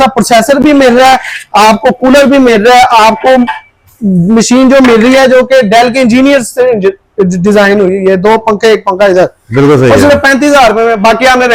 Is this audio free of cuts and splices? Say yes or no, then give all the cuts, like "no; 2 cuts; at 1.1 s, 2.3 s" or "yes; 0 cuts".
yes; 0 cuts